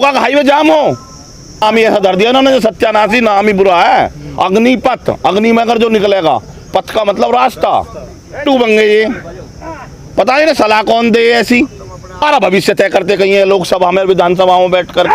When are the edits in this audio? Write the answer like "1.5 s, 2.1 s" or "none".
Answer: 1.6 s, 8.4 s, 12.2 s